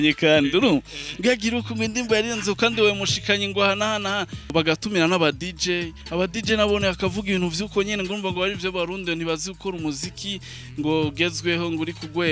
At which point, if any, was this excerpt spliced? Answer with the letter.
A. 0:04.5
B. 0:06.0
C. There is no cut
A